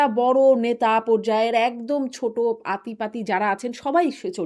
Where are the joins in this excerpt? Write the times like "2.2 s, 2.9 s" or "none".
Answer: none